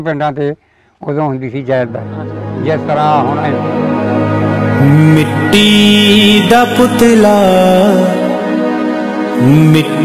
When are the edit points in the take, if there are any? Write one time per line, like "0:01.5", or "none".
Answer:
0:03.5